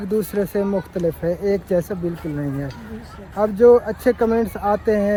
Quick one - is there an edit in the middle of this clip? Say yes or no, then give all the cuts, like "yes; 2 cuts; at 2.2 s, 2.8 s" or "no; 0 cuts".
no; 0 cuts